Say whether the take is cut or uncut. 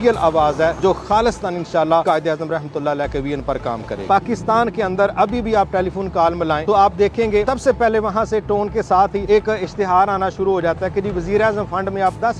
cut